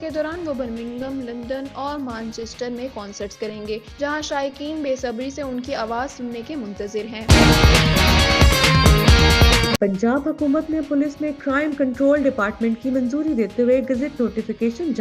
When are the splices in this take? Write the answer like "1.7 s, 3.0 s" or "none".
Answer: 7.2 s, 9.8 s